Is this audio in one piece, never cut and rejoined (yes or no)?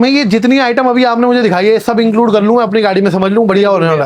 yes